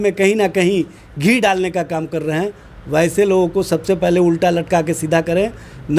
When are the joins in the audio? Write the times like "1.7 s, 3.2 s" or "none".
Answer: none